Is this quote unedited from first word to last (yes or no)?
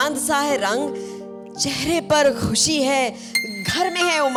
yes